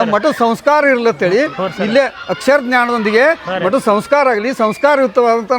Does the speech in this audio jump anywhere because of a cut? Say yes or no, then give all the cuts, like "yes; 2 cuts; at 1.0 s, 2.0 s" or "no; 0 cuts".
no; 0 cuts